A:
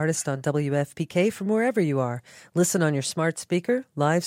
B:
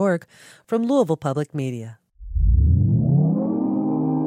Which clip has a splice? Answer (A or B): B